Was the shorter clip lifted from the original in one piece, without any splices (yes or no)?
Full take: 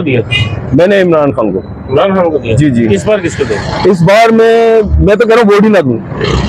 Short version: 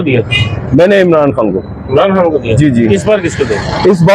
yes